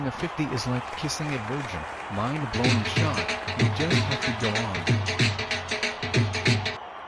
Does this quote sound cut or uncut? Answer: uncut